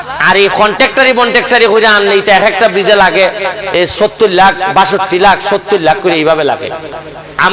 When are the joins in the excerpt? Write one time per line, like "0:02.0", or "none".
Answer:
none